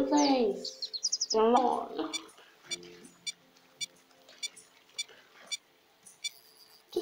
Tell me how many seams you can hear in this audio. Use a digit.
1